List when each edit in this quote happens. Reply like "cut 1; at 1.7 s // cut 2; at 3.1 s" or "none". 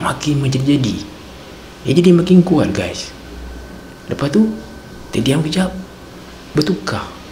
none